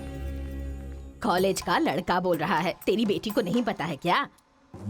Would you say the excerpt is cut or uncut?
uncut